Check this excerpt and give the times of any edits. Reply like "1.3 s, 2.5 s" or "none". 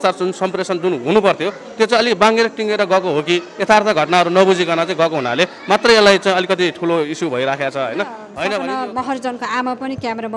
8.5 s